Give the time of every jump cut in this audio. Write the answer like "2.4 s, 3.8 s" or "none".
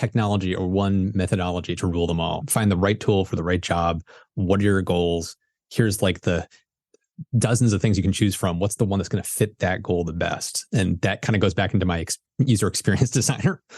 2.4 s